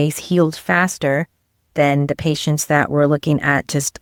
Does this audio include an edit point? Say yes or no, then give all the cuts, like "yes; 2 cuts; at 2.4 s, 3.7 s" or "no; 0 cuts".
no; 0 cuts